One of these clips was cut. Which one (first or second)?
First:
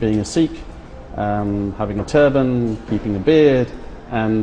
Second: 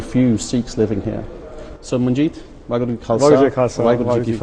first